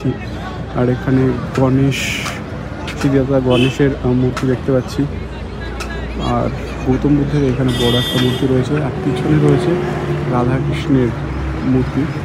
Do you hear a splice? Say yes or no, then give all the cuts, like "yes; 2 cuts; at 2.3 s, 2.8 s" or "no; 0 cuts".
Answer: no; 0 cuts